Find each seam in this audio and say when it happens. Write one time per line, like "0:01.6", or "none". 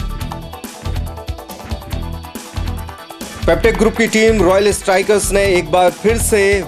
none